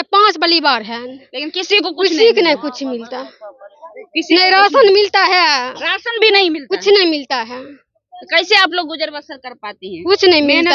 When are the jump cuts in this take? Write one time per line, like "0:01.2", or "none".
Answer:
none